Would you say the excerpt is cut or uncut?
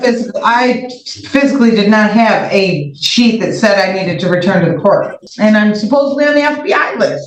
cut